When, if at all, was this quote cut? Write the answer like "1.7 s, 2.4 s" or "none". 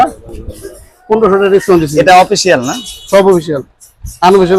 none